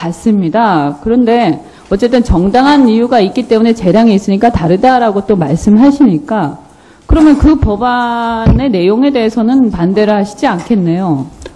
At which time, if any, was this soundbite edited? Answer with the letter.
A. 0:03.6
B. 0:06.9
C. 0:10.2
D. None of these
A